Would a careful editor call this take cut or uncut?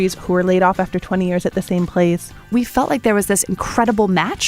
cut